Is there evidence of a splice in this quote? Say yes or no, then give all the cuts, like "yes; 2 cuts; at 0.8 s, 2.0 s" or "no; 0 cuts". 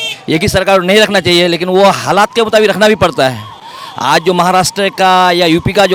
no; 0 cuts